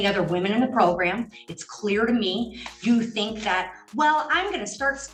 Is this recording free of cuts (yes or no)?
yes